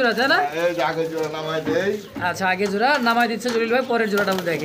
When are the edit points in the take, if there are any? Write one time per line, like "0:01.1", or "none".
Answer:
none